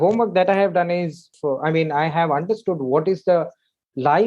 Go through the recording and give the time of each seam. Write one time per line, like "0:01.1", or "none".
0:01.3